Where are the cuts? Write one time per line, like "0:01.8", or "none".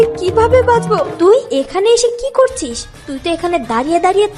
0:01.1